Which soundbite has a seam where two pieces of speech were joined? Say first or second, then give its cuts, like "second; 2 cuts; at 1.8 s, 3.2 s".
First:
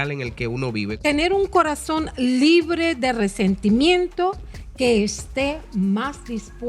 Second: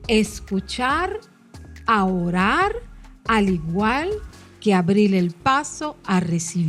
first; 1 cut; at 1.0 s